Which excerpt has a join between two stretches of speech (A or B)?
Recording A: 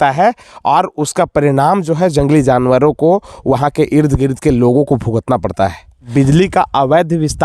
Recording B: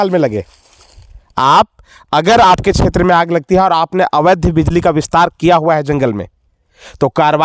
A